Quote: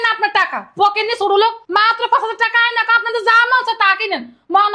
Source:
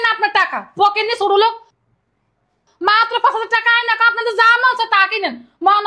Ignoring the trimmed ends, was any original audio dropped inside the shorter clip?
yes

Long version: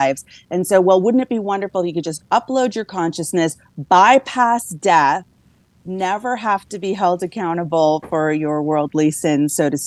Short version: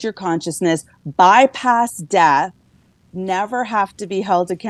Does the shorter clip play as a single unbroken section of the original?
yes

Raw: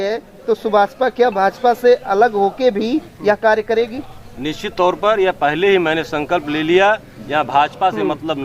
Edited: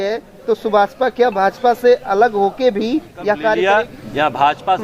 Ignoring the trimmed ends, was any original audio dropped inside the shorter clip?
yes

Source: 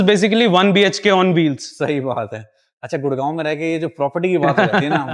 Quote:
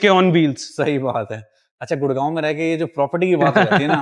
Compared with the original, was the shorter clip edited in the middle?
no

